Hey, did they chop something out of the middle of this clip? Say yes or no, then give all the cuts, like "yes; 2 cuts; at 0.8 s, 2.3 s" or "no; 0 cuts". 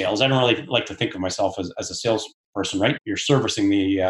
yes; 1 cut; at 2.9 s